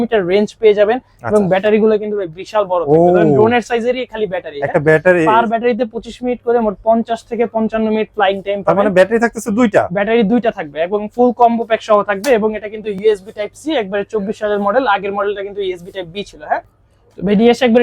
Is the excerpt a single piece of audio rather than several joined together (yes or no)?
no